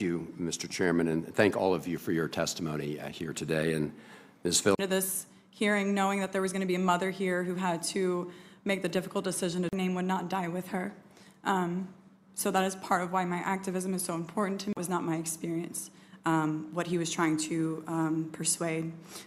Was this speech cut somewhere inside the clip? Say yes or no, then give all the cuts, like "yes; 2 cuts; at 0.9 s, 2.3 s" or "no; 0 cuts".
no; 0 cuts